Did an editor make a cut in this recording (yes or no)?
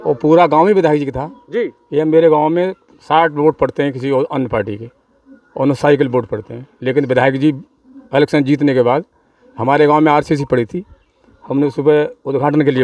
no